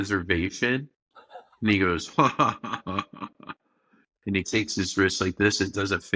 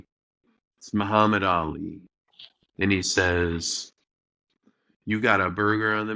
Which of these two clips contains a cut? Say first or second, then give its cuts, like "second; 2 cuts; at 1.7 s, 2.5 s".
first; 1 cut; at 4.1 s